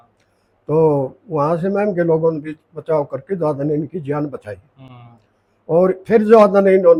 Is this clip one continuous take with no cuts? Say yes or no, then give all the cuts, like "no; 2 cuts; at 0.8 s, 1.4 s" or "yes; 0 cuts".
yes; 0 cuts